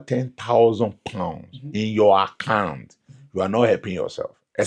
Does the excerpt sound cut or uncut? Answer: uncut